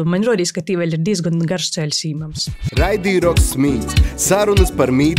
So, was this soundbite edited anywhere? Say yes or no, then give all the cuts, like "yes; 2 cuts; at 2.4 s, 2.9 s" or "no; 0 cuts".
no; 0 cuts